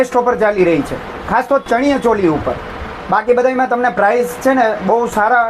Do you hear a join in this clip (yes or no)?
no